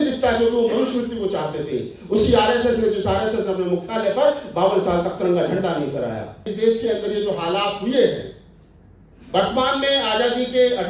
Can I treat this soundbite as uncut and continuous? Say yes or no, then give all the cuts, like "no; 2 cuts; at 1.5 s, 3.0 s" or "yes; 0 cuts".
no; 1 cut; at 6.5 s